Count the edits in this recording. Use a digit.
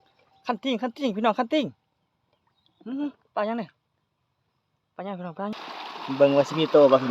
1